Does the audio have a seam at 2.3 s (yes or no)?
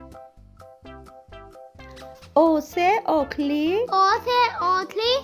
yes